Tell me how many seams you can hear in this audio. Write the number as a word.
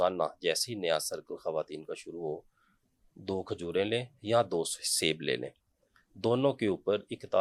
zero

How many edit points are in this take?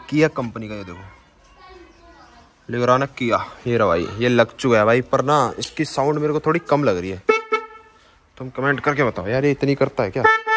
zero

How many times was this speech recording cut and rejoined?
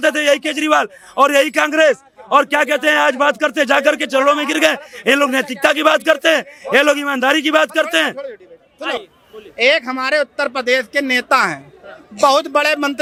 zero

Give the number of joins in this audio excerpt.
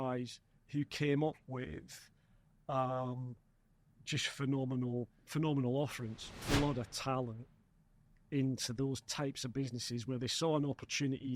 one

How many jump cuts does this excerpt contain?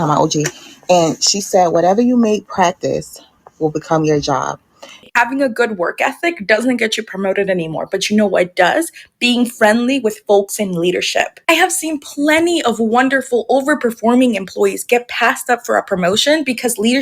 one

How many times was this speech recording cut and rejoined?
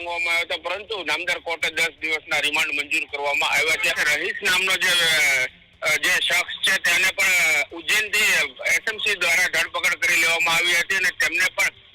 one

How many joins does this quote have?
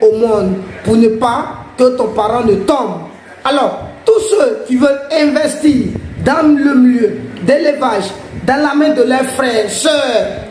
zero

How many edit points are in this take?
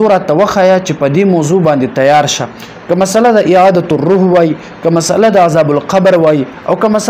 zero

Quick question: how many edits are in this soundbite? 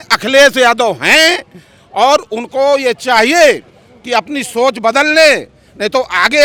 zero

